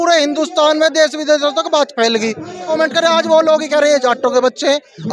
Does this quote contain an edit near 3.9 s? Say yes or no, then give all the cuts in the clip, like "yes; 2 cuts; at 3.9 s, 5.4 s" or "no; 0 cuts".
no; 1 cut; at 2.7 s